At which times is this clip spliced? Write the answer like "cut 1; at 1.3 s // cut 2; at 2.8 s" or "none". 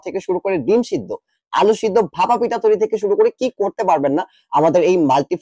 none